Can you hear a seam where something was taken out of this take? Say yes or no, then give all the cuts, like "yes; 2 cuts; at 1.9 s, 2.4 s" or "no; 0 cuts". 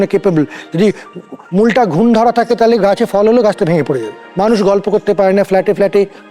yes; 1 cut; at 4.2 s